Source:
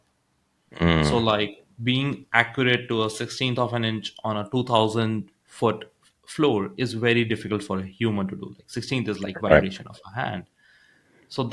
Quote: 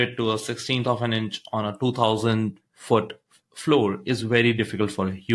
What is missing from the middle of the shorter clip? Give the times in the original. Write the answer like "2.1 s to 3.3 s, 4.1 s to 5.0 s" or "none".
none

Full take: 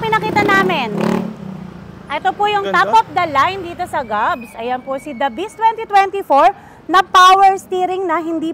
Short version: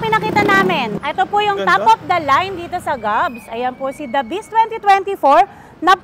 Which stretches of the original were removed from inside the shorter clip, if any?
0.9 s to 2.0 s

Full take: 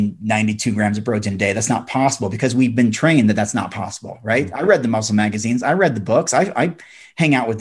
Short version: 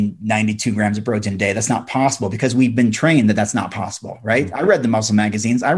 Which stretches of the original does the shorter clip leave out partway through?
none

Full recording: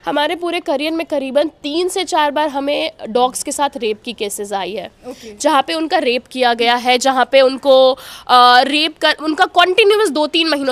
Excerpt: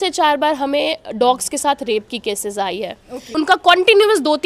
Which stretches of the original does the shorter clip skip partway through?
5.2 s to 9.2 s

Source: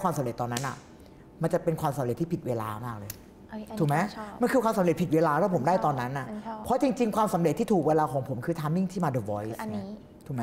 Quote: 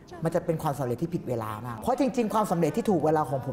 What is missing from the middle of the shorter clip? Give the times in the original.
2.9 s to 6.5 s

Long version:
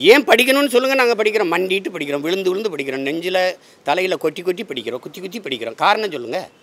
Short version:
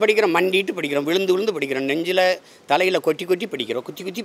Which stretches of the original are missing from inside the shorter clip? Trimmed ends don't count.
none

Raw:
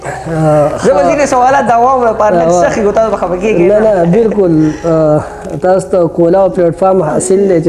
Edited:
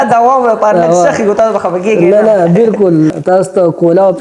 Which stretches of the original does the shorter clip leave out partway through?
4.7 s to 5.5 s

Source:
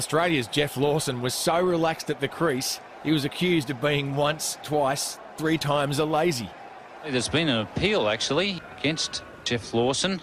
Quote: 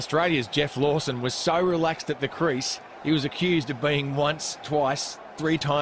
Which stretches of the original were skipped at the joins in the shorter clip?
none

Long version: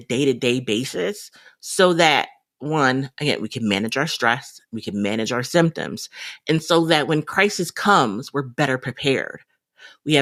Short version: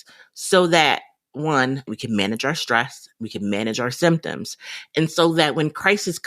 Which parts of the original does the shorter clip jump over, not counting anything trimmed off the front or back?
3.2 s to 3.4 s

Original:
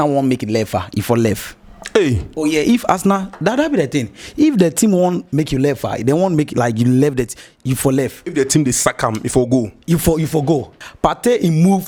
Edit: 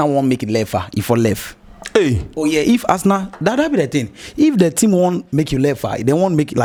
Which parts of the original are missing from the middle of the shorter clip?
none

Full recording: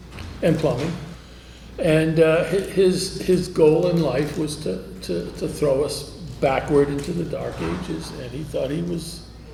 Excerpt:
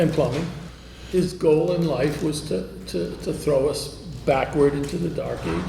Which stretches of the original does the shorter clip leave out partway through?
1.4 s to 3.1 s

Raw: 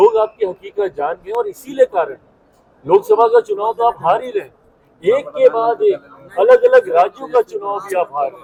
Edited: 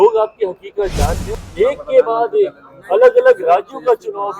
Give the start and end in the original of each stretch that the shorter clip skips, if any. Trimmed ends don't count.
1.2 s to 4.6 s

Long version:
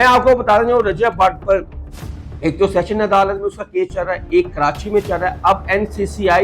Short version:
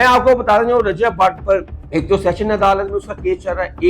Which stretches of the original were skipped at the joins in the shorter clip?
1.8 s to 2.3 s

